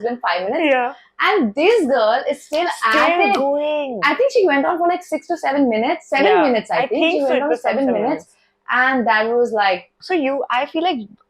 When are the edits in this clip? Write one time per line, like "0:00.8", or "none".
0:09.9